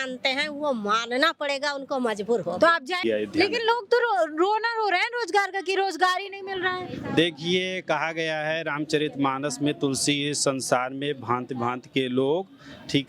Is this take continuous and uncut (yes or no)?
yes